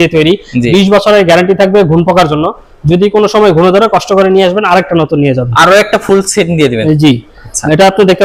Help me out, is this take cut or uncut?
uncut